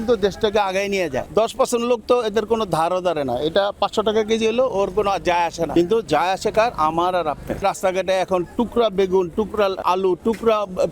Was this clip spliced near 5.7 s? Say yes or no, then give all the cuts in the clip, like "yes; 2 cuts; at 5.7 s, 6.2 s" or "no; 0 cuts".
yes; 4 cuts; at 1.2 s, 5.7 s, 7.6 s, 9.8 s